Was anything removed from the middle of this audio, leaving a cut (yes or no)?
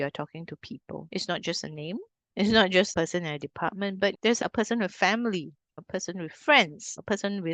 yes